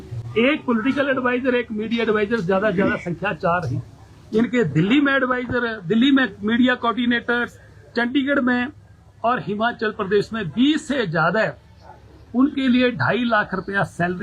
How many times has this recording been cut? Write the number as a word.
zero